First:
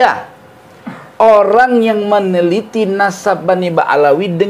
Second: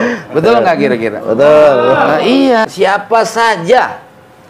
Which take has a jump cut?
second; 1 cut; at 2.7 s

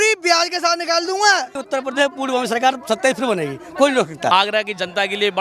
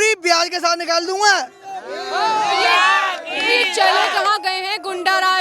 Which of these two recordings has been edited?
first; 2 cuts; at 1.6 s, 4.3 s

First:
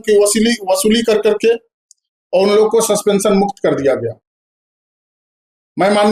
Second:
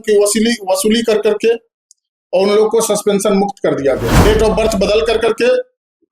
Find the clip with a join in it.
second; 1 cut; at 4.1 s

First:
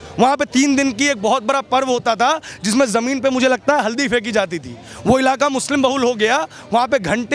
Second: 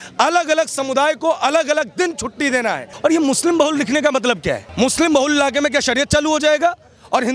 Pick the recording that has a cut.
second; 2 cuts; at 2.9 s, 4.7 s

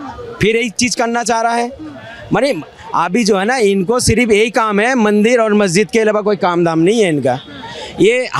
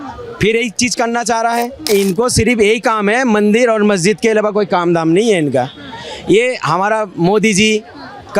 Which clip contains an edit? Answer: second; 1 cut; at 1.9 s

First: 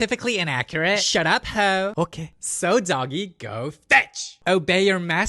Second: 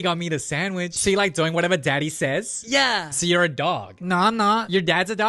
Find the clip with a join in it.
first; 1 cut; at 4.4 s

